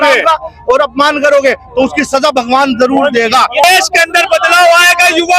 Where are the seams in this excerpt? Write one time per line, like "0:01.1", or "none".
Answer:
0:03.6